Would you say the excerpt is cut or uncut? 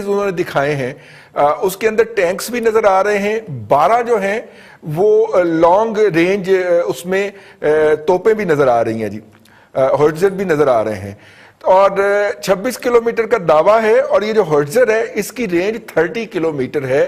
uncut